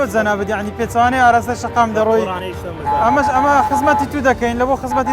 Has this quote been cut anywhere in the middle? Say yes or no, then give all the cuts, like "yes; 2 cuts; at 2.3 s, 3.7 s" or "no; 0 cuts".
no; 0 cuts